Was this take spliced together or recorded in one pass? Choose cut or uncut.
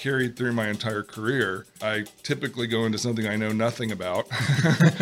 cut